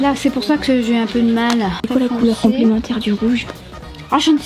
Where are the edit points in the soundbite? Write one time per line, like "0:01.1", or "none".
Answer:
0:01.8